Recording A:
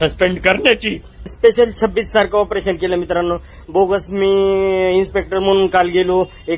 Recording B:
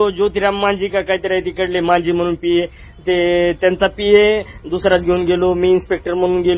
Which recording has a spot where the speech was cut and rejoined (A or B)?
A